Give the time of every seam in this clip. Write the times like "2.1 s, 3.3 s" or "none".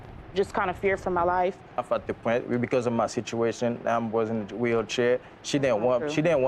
1.8 s